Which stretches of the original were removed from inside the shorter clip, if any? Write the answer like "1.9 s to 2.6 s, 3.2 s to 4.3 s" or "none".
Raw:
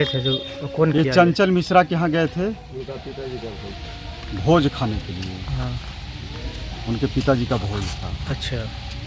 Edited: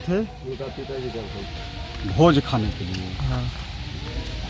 none